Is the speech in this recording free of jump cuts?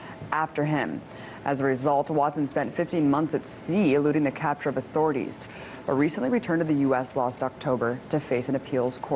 yes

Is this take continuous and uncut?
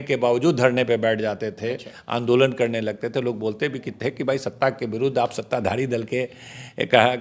yes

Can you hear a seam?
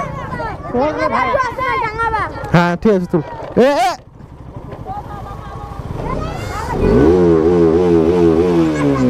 no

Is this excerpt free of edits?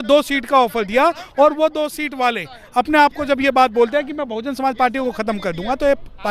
yes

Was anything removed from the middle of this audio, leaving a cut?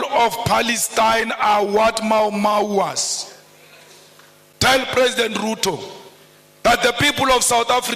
yes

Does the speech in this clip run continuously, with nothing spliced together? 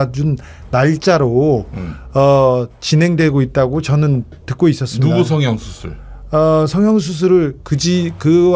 no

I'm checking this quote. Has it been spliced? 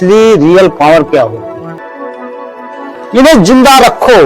yes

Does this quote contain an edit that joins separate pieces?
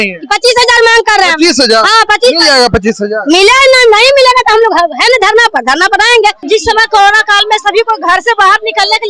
yes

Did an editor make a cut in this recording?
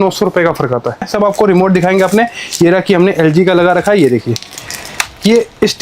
yes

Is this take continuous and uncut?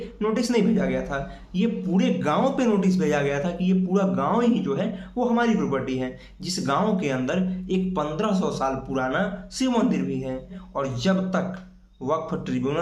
no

